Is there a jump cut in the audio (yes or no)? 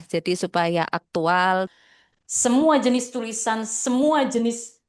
yes